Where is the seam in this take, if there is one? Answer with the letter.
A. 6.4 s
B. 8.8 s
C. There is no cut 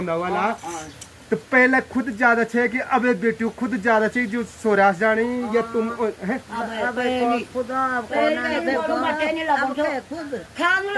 C